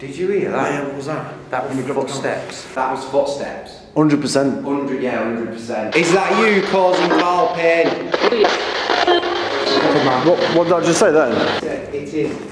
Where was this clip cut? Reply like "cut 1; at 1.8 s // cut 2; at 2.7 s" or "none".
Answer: cut 1; at 2.6 s // cut 2; at 5.9 s // cut 3; at 8.1 s // cut 4; at 11.6 s